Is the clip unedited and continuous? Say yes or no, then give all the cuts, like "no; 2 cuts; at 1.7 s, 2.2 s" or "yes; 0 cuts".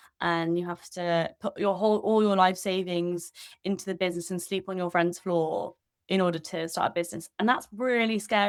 yes; 0 cuts